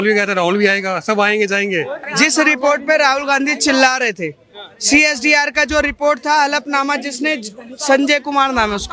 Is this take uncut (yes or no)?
no